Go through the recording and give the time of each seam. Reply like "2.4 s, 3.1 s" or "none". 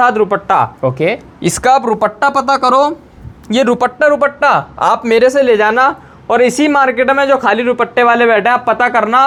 none